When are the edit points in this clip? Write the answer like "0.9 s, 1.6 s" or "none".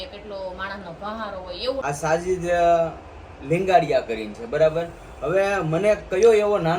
1.8 s